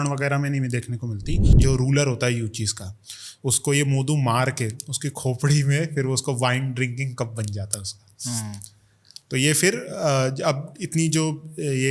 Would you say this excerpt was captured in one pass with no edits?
no; 1 cut; at 1.5 s

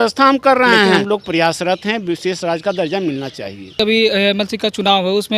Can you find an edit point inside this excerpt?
yes; 2 cuts; at 1.0 s, 3.8 s

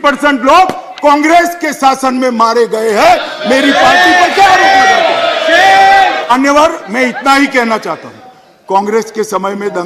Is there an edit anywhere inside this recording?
yes; 1 cut; at 6.3 s

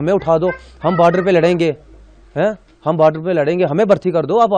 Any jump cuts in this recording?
no; 0 cuts

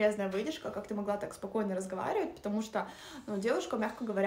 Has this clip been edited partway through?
no; 0 cuts

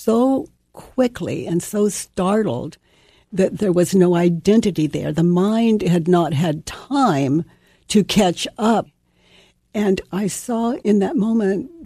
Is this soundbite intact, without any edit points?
no; 2 cuts; at 9.0 s, 10.8 s

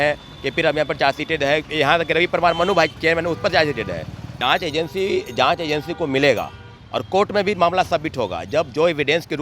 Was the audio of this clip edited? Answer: yes; 1 cut; at 4.2 s

